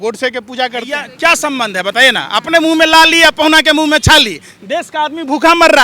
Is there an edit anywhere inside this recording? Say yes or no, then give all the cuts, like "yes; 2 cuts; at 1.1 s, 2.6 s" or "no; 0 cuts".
yes; 1 cut; at 1.1 s